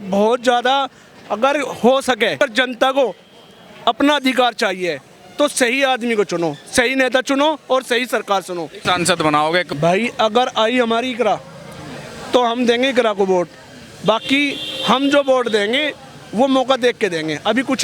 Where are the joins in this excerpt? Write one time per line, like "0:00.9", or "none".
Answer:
0:02.4
0:08.8
0:09.7